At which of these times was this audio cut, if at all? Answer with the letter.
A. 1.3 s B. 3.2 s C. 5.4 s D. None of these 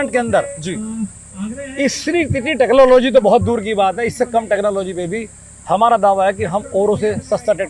D